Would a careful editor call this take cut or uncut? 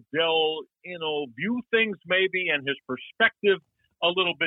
uncut